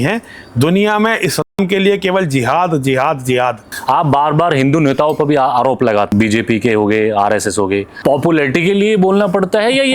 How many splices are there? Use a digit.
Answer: 3